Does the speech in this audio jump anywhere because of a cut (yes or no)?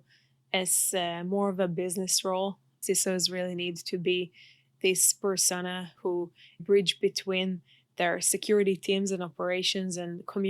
yes